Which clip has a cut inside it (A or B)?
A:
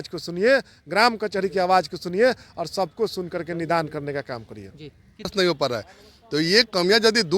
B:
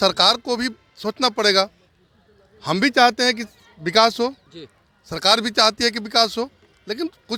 A